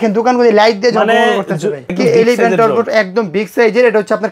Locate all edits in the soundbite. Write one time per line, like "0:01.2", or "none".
0:01.9

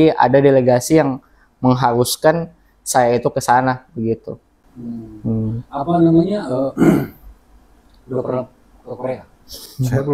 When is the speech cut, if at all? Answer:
none

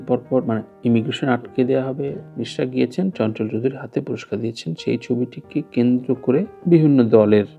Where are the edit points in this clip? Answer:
0:02.2

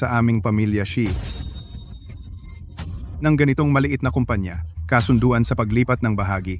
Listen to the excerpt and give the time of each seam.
none

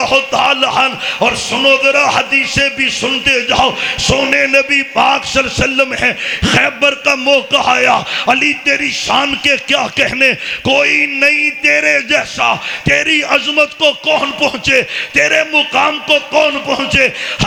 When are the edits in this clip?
none

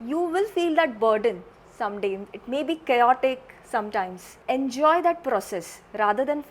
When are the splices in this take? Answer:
0:04.3

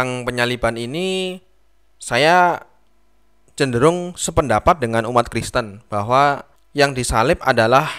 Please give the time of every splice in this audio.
none

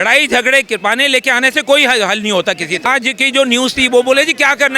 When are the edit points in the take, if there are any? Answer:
0:02.9

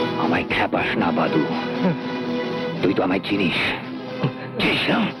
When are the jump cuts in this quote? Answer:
none

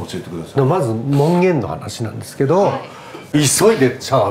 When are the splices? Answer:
0:03.2

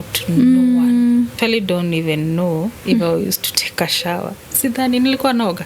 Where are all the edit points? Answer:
0:01.3

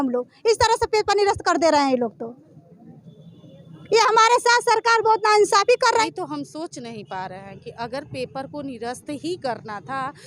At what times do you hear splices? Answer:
0:06.0

